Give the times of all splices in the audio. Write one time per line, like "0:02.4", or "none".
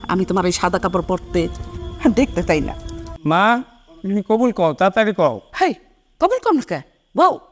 0:03.1

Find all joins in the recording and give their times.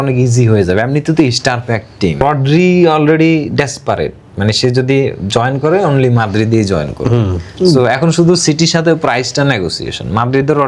0:02.2

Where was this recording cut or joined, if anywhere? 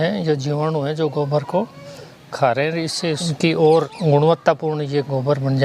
0:03.9

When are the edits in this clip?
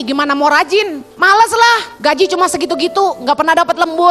0:01.1
0:01.9

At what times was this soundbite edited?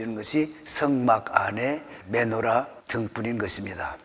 0:01.9
0:02.8

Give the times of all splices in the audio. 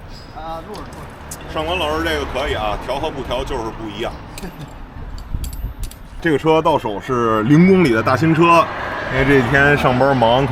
0:06.2

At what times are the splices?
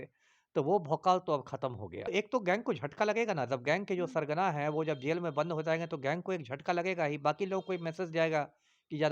0:02.1

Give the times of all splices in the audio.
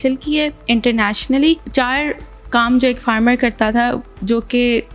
0:01.6

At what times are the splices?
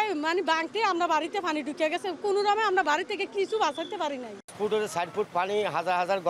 0:04.4

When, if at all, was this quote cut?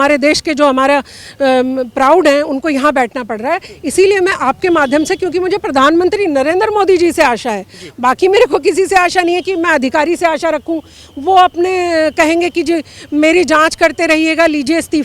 none

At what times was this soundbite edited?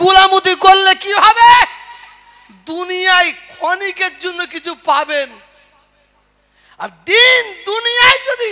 none

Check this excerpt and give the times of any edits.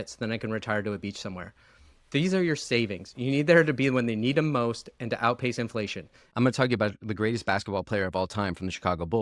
0:06.2

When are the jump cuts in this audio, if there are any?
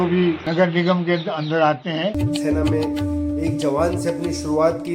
0:02.2

